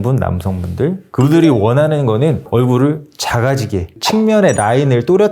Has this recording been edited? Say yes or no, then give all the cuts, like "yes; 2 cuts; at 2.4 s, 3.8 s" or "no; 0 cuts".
yes; 1 cut; at 3.9 s